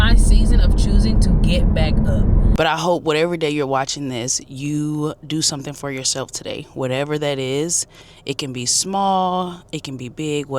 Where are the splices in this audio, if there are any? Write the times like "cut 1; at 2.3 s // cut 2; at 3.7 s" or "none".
cut 1; at 2.5 s